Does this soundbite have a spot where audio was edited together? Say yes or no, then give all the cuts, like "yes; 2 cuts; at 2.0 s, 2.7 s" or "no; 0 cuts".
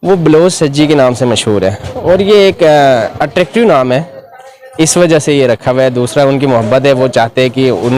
no; 0 cuts